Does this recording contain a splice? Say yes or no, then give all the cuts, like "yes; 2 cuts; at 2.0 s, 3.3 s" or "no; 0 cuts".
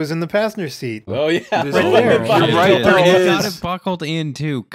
yes; 1 cut; at 1.1 s